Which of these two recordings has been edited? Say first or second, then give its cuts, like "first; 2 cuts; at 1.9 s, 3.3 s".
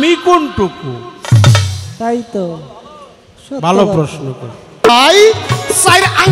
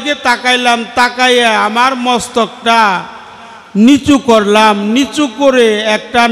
first; 1 cut; at 4.9 s